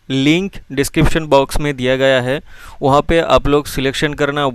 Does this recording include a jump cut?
no; 0 cuts

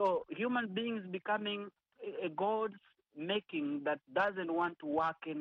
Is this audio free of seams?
no; 1 cut; at 1.9 s

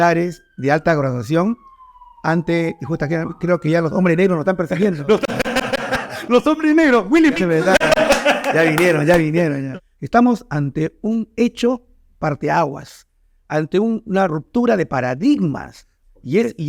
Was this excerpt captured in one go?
no; 1 cut; at 9.6 s

